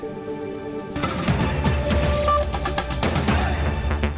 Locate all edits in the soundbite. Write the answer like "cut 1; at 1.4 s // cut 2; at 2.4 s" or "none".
none